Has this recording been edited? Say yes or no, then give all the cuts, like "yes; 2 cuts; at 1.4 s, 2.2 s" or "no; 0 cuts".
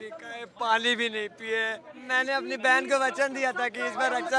yes; 1 cut; at 1.9 s